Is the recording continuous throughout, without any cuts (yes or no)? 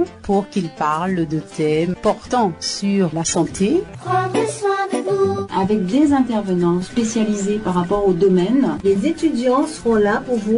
yes